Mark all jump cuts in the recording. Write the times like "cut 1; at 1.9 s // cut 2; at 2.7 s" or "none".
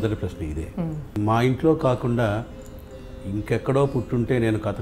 cut 1; at 1.1 s